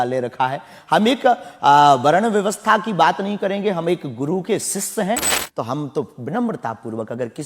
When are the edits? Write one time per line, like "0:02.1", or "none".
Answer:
0:05.3